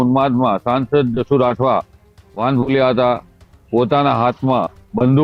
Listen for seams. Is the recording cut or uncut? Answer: uncut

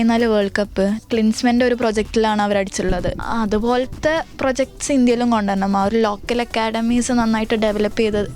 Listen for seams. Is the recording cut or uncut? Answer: cut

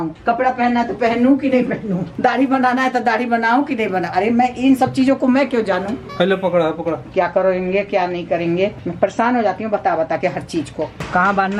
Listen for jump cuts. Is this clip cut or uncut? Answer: uncut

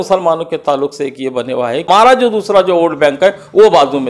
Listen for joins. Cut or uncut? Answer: cut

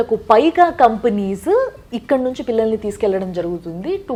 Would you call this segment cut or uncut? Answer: uncut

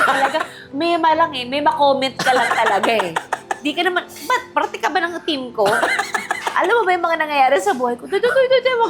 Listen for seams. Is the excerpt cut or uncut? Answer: uncut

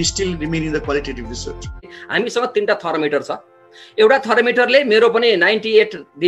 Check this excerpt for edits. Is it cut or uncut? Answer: cut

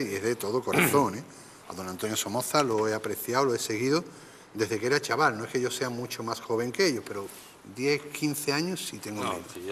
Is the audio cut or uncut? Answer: uncut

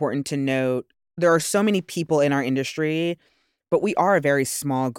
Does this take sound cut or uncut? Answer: cut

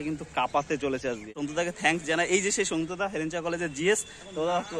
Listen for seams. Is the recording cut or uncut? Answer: cut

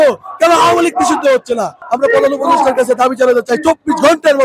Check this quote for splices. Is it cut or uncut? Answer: cut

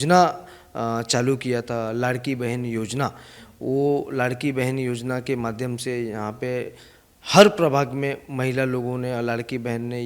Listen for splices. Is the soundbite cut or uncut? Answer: uncut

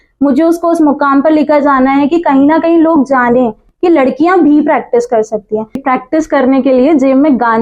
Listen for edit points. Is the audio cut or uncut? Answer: cut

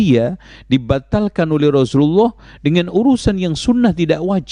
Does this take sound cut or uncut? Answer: uncut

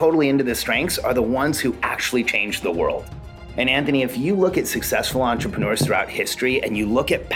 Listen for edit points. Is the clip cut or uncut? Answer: cut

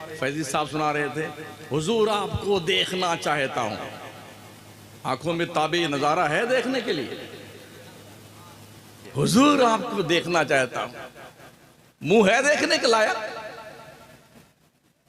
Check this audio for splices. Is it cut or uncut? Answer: cut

